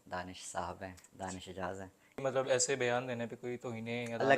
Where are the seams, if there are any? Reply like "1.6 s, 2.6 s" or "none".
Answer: 2.2 s